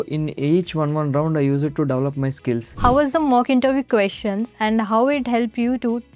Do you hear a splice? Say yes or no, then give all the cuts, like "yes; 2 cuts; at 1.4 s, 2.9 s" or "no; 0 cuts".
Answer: yes; 1 cut; at 2.7 s